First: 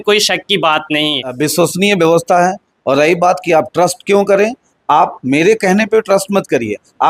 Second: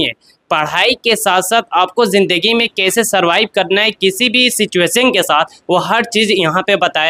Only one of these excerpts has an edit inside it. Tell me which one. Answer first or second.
first